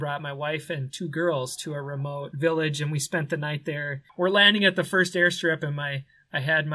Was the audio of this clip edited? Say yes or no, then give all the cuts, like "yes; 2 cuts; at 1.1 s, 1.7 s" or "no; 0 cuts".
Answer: yes; 2 cuts; at 2.3 s, 4.0 s